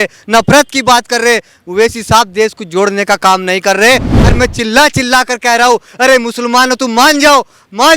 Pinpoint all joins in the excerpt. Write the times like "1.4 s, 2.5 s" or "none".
4.1 s